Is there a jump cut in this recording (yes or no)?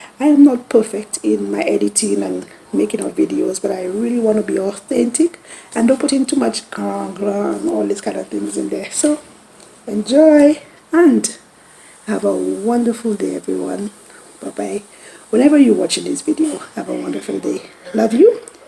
no